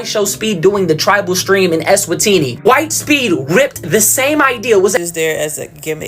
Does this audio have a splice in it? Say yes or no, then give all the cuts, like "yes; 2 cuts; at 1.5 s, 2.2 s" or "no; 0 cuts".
yes; 1 cut; at 5.0 s